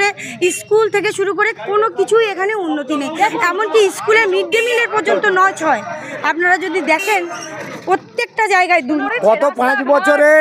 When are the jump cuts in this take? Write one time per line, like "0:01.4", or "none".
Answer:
0:09.1